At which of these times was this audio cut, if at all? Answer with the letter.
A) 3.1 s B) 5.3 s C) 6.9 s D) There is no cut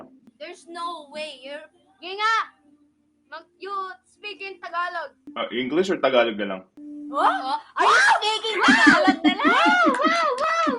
B